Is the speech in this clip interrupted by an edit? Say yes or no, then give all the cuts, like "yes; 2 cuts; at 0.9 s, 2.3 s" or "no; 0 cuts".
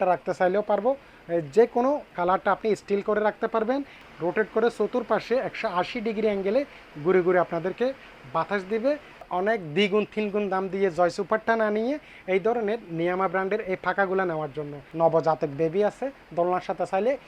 yes; 3 cuts; at 4.0 s, 9.2 s, 14.8 s